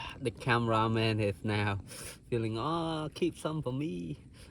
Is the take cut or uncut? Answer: uncut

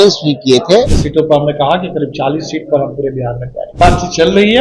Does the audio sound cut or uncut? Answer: cut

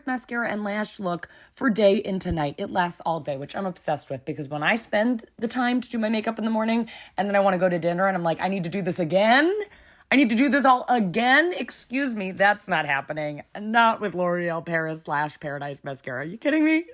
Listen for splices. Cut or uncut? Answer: uncut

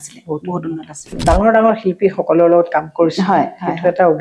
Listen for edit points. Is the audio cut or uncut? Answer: cut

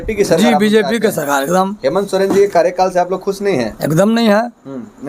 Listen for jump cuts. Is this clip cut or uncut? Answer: uncut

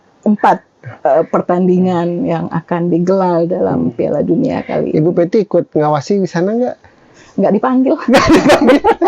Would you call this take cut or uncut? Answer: uncut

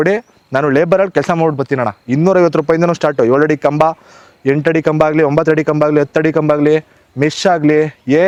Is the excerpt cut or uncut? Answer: uncut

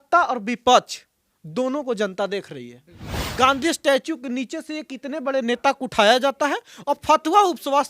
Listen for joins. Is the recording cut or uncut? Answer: cut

